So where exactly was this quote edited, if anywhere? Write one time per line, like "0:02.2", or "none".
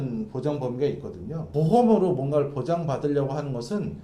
0:01.4